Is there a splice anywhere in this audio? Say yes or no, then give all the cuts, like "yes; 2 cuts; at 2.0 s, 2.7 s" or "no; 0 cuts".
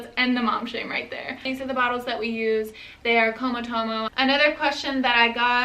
yes; 2 cuts; at 1.4 s, 4.1 s